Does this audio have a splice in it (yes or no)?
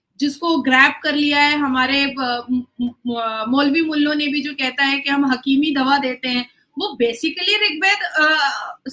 no